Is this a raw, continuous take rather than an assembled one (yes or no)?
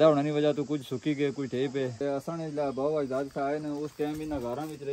no